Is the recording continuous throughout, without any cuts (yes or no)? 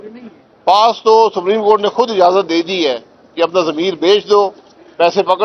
yes